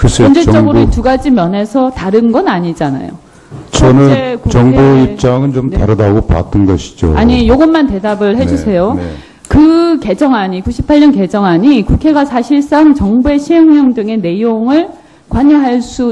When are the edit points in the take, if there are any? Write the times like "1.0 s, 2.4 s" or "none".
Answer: 0.9 s